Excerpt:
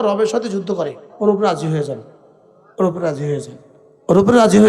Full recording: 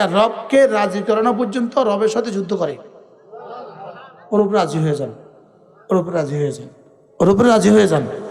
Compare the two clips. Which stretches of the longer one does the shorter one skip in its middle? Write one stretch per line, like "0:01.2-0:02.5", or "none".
0:02.9-0:04.1